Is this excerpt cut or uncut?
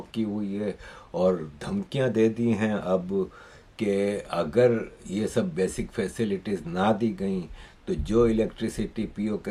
uncut